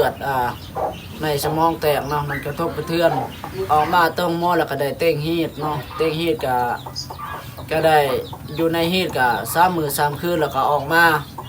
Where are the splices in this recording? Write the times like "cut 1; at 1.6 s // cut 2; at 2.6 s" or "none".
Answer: cut 1; at 3.6 s